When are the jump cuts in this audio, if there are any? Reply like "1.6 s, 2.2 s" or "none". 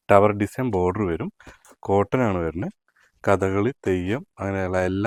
none